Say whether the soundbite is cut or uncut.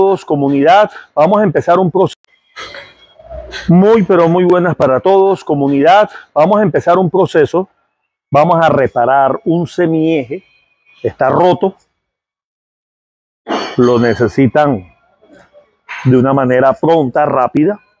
cut